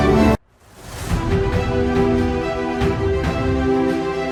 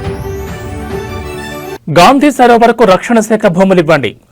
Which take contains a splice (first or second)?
second